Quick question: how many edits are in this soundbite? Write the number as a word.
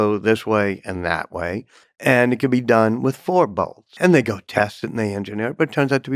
one